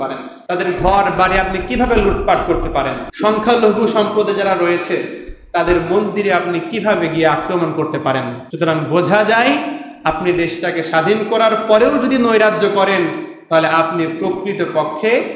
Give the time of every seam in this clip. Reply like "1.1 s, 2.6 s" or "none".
none